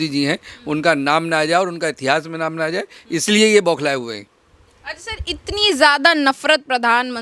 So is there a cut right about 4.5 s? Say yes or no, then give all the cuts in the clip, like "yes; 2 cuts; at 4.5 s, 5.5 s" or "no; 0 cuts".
no; 0 cuts